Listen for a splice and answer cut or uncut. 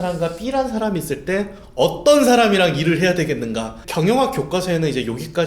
cut